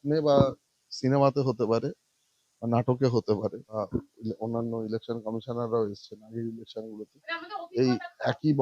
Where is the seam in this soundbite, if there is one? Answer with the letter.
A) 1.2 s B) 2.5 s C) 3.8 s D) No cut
C